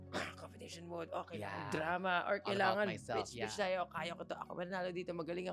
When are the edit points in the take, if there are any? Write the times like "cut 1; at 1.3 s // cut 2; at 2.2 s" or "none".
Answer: none

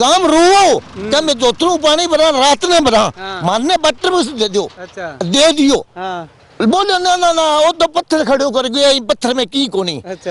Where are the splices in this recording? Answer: none

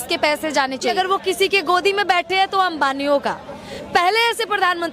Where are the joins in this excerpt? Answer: cut 1; at 0.9 s

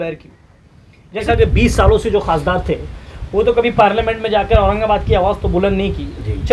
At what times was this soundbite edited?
cut 1; at 1.3 s

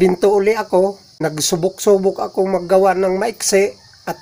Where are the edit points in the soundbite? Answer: cut 1; at 1.1 s

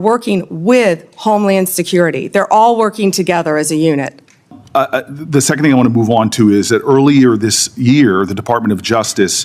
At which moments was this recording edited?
cut 1; at 4.6 s

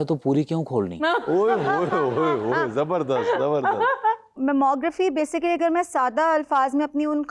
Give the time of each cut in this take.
cut 1; at 4.3 s

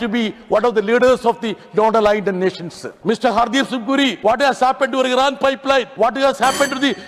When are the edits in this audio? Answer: cut 1; at 2.9 s // cut 2; at 4.2 s // cut 3; at 5.9 s

